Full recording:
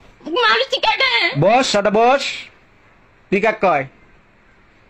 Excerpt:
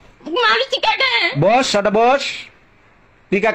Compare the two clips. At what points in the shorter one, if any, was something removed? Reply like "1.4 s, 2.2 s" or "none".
none